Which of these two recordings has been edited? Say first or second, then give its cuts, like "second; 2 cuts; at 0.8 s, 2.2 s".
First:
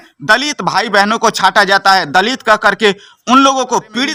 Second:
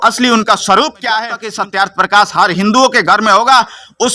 second; 1 cut; at 1.4 s